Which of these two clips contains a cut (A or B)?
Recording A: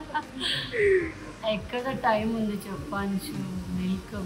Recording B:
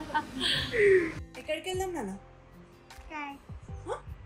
B